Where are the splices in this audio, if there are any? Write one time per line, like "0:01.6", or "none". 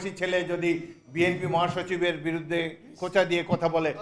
none